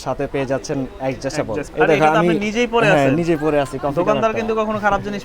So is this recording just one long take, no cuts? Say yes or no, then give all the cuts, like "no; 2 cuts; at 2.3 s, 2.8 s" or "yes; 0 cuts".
no; 1 cut; at 1.7 s